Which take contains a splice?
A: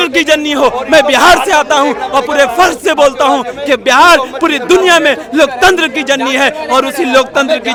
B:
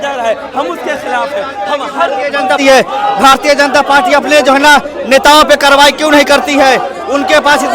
B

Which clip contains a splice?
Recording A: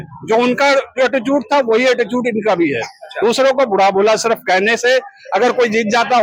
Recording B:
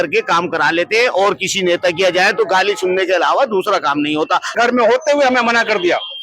B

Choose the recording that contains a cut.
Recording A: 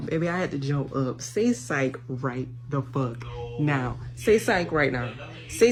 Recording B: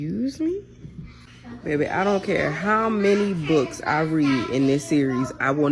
B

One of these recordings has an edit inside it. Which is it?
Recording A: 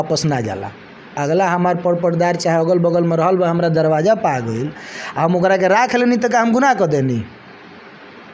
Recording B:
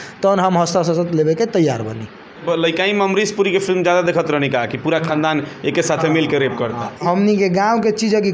B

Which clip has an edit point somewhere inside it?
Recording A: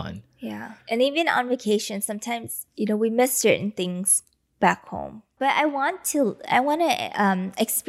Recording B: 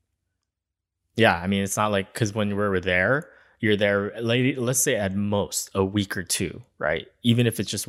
A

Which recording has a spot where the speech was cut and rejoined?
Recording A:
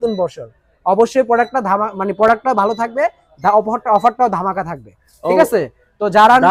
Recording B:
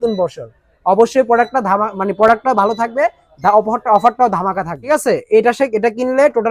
B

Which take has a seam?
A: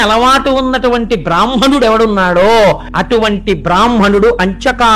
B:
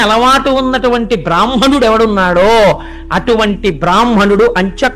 A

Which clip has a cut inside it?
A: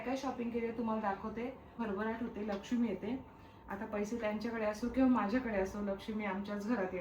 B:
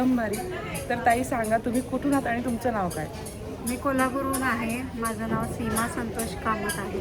A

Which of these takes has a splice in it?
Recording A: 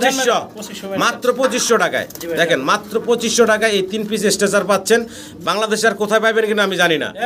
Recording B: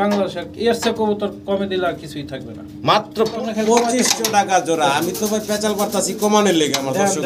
B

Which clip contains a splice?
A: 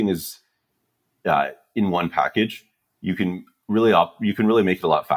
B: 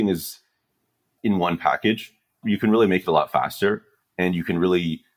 B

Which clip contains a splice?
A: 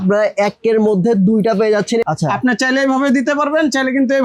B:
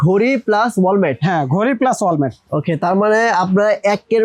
A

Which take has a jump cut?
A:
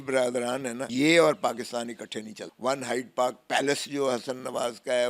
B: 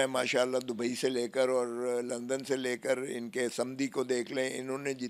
A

